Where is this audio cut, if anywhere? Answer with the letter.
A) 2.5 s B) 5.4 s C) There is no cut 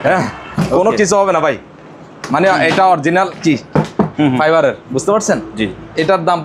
C